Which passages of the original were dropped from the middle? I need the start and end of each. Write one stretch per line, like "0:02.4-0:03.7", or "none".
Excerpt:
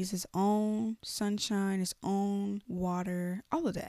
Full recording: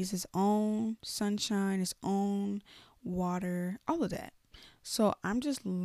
0:02.7-0:03.0